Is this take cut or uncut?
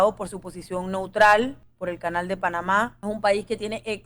cut